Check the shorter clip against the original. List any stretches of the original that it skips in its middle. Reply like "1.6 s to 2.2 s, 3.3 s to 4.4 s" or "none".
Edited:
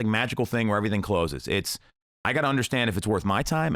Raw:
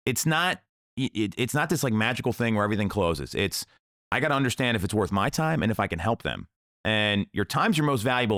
none